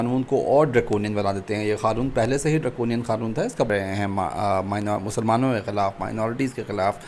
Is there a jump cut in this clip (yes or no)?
yes